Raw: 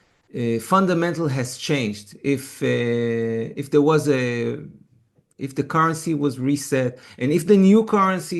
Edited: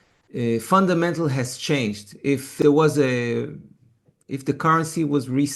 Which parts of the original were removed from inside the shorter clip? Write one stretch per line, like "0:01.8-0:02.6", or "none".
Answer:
0:02.5-0:03.6